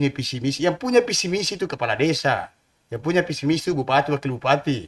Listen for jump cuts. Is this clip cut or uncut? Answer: uncut